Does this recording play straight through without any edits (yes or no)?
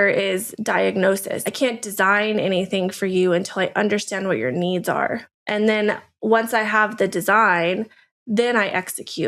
no